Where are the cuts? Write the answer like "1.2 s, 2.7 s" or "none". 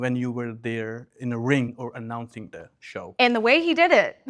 1.7 s, 3.1 s